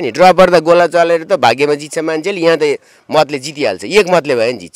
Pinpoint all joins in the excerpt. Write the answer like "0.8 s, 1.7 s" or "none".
none